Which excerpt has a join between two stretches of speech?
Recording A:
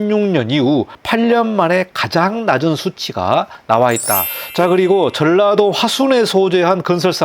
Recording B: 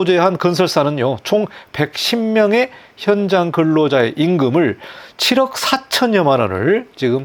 A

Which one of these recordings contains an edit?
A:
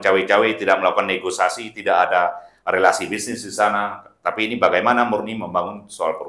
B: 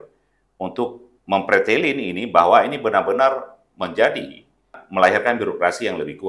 B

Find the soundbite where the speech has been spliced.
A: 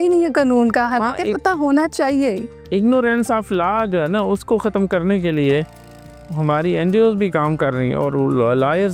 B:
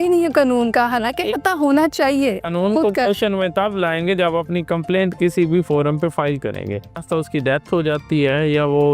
B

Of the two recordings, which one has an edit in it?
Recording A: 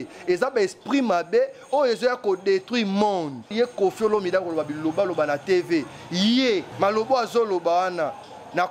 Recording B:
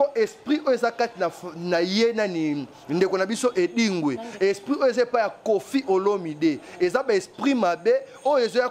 A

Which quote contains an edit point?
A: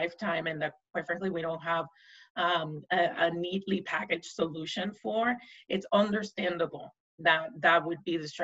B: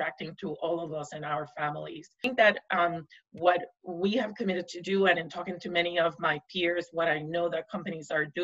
B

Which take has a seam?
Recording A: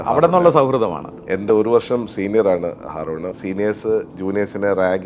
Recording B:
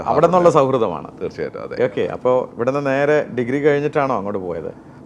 A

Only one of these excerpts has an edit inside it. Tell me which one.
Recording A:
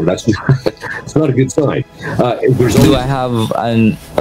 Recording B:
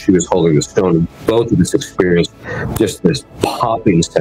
A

